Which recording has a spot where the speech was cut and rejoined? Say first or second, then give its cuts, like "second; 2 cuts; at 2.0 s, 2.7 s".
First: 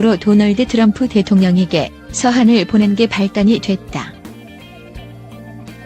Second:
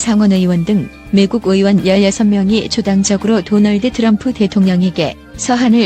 first; 1 cut; at 4.1 s